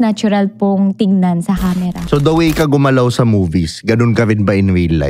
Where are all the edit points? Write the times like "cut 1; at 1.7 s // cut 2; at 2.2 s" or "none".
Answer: cut 1; at 2.0 s

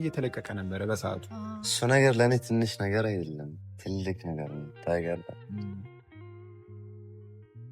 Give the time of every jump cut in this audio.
cut 1; at 1.7 s

